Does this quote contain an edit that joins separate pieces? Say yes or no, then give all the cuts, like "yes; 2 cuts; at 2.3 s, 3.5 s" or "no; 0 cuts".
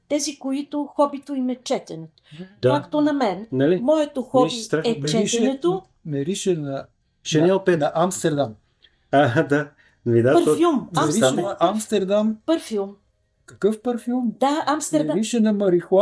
no; 0 cuts